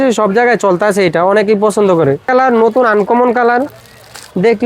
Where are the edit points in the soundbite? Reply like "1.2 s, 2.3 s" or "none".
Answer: 2.3 s